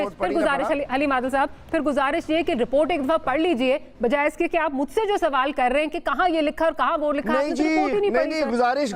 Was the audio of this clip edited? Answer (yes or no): no